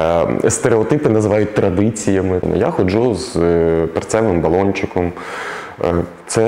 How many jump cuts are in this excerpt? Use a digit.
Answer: 1